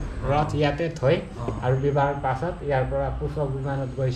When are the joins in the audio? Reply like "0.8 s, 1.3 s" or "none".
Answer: none